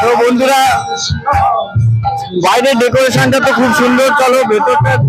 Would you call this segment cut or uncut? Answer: uncut